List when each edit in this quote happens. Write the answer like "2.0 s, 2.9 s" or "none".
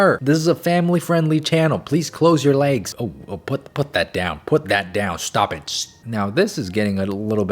2.9 s, 5.9 s